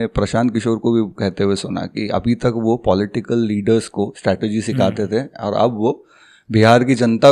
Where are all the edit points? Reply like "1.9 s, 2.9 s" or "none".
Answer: none